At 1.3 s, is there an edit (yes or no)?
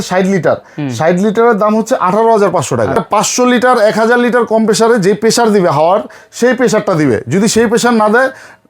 no